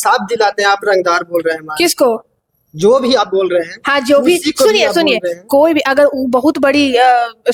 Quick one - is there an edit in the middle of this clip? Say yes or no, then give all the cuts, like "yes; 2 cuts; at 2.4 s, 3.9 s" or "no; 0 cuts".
no; 0 cuts